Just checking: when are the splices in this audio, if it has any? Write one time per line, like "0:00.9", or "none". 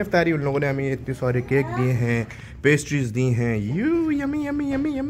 none